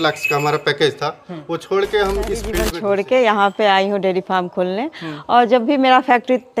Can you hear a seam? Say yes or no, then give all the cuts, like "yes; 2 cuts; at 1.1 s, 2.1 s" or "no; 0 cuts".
yes; 1 cut; at 2.6 s